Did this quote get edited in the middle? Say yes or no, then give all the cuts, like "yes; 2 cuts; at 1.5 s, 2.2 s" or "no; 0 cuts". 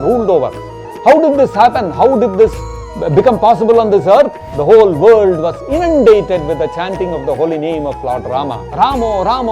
yes; 2 cuts; at 4.4 s, 8.6 s